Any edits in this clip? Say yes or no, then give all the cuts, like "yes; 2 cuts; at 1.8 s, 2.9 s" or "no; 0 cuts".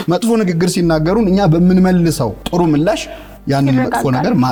no; 0 cuts